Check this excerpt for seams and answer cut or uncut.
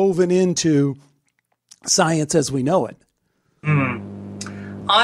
uncut